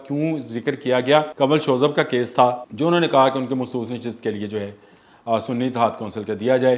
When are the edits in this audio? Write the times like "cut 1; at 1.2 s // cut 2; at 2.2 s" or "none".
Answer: cut 1; at 1.3 s // cut 2; at 2.7 s